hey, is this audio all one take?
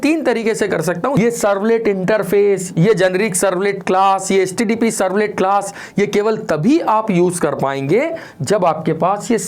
no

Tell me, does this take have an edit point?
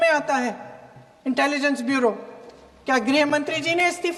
no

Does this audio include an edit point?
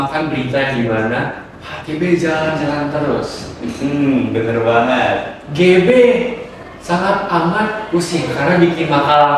no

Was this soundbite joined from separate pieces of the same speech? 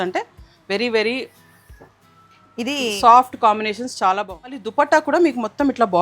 yes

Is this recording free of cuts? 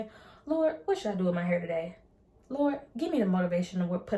yes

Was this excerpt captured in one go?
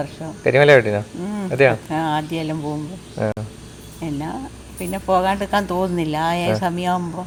yes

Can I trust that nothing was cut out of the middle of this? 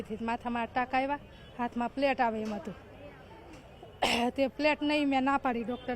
yes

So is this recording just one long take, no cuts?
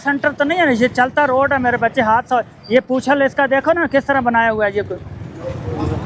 yes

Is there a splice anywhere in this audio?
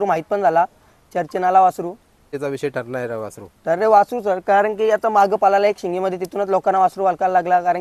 yes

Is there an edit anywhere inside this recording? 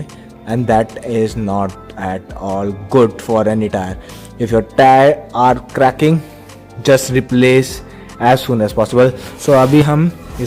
no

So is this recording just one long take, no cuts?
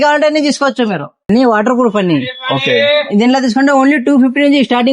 no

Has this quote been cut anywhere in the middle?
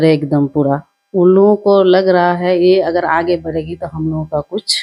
no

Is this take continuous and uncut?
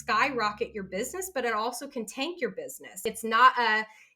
no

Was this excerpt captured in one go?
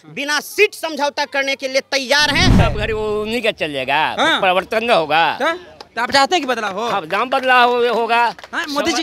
no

